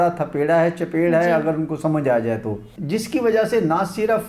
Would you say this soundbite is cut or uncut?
uncut